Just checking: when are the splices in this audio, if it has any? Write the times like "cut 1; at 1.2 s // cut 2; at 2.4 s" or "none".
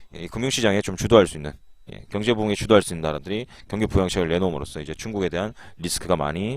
cut 1; at 1.0 s